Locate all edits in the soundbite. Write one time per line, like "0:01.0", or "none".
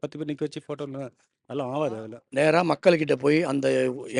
0:02.2